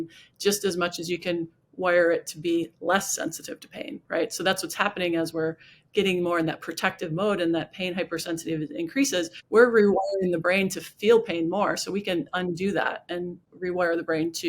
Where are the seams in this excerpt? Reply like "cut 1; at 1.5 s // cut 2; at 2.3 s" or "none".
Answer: cut 1; at 9.4 s // cut 2; at 13.4 s